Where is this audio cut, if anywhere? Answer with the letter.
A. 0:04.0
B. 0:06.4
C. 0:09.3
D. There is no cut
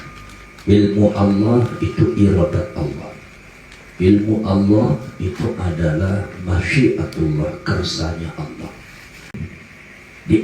C